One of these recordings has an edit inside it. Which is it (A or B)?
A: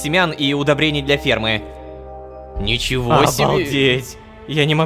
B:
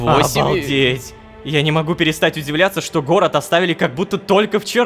A